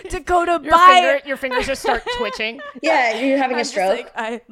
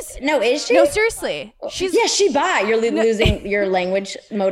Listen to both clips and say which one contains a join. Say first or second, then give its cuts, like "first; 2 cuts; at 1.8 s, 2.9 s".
second; 1 cut; at 0.9 s